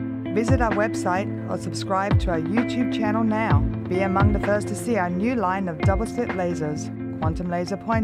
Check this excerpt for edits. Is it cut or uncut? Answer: uncut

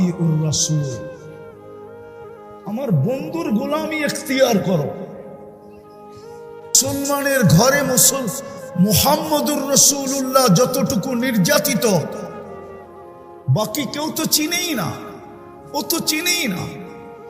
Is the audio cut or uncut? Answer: uncut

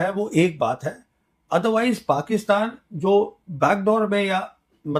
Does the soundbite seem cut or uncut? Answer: uncut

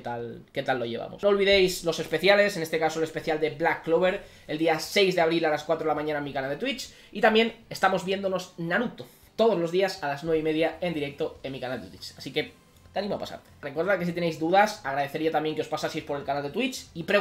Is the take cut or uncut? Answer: cut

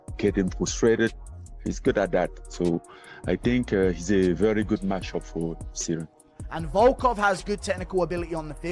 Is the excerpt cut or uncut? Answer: cut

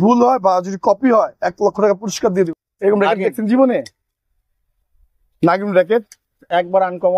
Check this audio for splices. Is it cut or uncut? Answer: cut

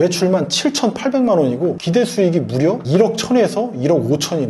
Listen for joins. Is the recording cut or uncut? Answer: uncut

